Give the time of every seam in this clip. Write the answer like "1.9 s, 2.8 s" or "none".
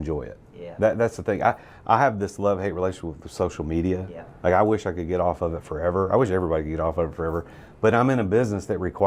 none